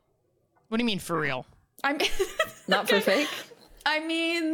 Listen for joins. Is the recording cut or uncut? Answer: uncut